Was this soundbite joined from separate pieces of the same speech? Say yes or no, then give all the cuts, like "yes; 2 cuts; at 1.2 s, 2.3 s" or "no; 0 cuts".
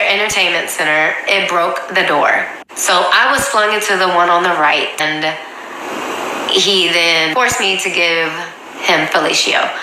yes; 1 cut; at 5.0 s